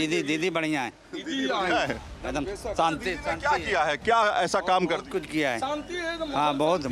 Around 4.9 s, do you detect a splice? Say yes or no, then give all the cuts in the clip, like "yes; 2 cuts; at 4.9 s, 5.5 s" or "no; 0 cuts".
no; 0 cuts